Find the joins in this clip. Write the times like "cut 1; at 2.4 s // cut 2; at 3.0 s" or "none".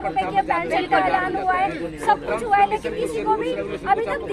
none